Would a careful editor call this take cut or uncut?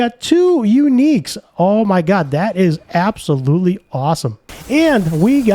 cut